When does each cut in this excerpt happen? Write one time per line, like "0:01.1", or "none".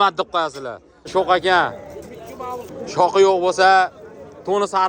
0:01.1